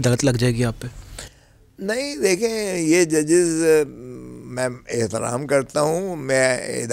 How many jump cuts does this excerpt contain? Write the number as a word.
zero